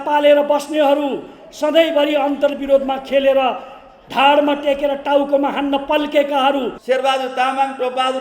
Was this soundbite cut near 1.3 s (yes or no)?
no